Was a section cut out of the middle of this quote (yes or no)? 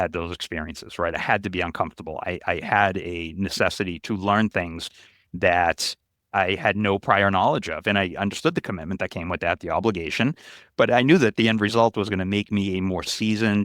yes